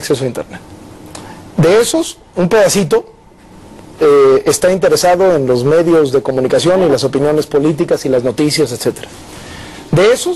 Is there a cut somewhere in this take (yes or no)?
no